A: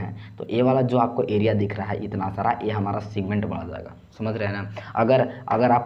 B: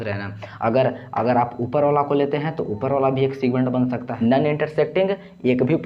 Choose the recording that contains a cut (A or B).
B